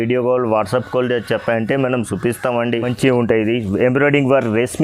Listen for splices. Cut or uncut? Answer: cut